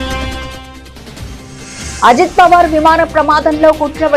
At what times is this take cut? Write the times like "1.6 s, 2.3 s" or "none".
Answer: 1.9 s